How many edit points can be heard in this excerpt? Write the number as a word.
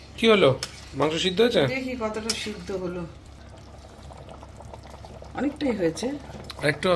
one